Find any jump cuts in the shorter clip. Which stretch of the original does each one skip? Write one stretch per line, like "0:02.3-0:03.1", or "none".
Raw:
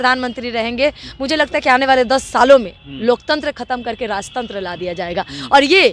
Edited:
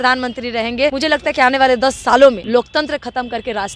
0:00.9-0:01.2
0:02.7-0:03.0